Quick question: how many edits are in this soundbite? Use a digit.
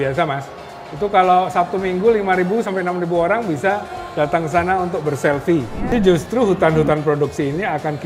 1